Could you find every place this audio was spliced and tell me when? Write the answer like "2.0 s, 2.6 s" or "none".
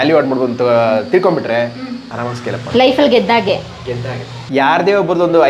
4.4 s